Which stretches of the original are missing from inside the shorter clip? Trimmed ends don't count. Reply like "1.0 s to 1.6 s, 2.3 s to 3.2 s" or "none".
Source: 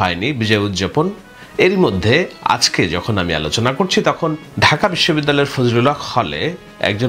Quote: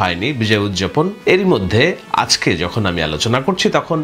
1.2 s to 1.5 s